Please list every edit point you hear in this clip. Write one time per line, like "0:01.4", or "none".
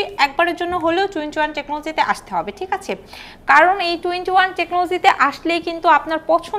none

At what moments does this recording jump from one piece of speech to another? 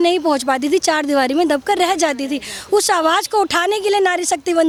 none

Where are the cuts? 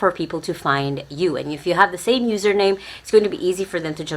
none

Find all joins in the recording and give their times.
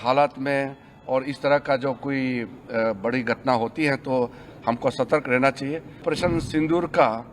0:06.0

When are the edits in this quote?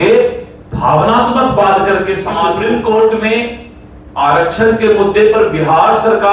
0:02.6

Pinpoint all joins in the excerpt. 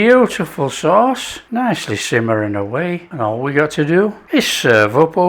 0:01.3
0:03.1
0:04.2

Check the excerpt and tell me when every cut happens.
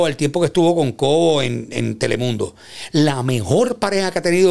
none

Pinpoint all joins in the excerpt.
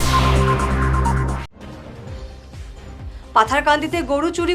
0:01.4
0:02.4

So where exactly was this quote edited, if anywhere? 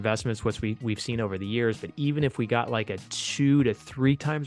none

